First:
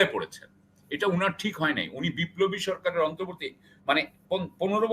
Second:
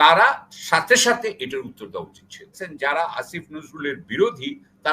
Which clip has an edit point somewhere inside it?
second; 1 cut; at 2.5 s

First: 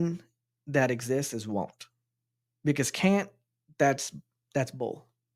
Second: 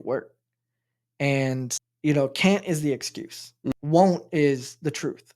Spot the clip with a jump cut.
second; 2 cuts; at 1.8 s, 3.7 s

